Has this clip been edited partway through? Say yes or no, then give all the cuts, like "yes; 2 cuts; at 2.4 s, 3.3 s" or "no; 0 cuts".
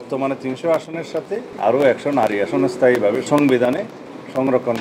yes; 2 cuts; at 1.5 s, 3.3 s